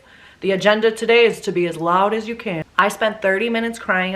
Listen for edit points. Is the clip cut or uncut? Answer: cut